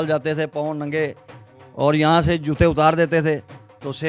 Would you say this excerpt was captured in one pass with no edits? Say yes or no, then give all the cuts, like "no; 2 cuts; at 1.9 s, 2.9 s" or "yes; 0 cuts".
yes; 0 cuts